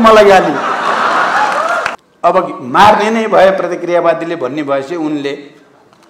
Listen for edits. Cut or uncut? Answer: cut